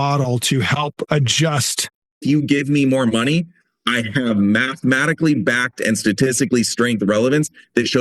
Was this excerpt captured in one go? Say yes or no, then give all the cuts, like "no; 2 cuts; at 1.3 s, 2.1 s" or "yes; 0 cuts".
no; 1 cut; at 2.2 s